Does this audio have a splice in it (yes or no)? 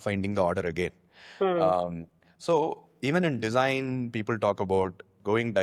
no